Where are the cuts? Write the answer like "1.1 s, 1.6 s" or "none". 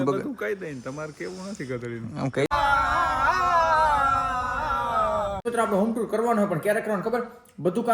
2.5 s, 5.5 s